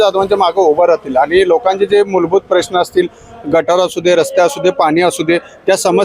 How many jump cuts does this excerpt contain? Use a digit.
0